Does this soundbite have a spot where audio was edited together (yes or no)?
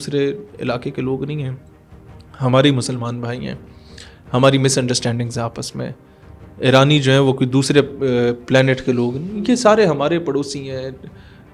no